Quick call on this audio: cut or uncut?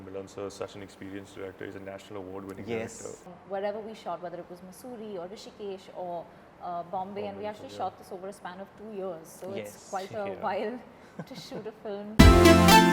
cut